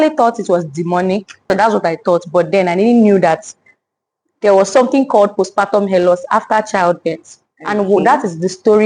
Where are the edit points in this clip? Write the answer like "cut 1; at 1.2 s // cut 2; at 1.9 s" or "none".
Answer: cut 1; at 1.4 s